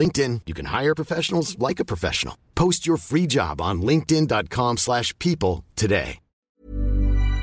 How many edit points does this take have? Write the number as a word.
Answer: one